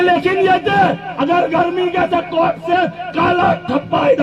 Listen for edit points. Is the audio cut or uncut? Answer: uncut